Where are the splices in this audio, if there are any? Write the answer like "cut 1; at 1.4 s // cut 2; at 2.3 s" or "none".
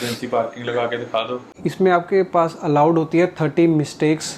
cut 1; at 1.5 s